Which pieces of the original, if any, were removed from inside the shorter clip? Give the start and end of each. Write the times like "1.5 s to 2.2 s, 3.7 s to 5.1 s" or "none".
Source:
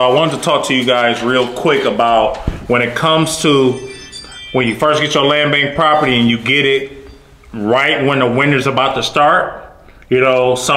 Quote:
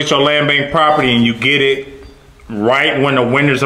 none